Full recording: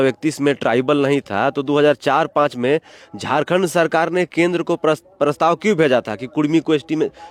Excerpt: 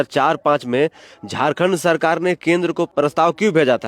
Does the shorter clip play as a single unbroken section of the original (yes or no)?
no